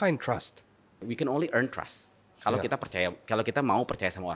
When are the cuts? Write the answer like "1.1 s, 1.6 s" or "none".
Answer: 1.0 s